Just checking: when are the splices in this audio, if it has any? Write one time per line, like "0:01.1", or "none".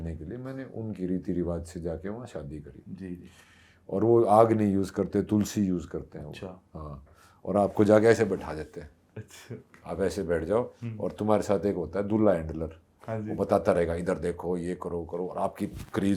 none